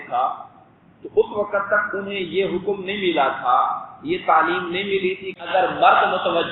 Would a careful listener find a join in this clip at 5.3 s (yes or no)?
yes